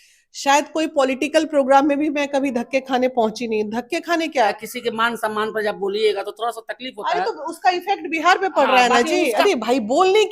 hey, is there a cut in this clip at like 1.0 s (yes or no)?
no